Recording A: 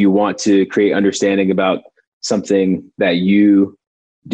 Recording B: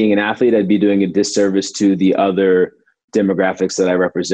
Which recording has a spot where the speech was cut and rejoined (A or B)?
B